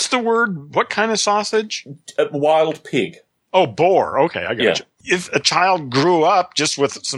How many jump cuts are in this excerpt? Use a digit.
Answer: 1